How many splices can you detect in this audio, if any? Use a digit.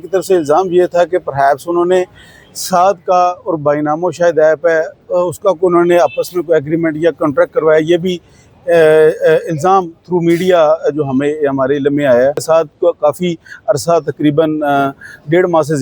1